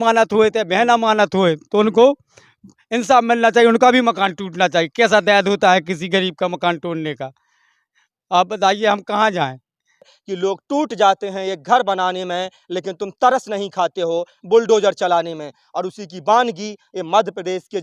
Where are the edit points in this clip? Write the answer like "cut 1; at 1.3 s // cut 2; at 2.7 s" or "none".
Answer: cut 1; at 10.2 s